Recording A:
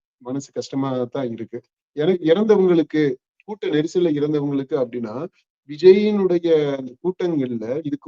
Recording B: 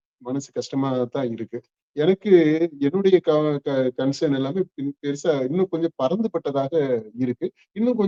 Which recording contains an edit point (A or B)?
A